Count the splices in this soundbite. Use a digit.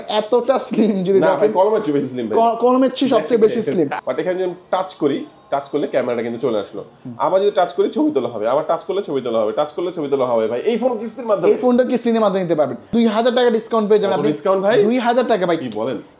2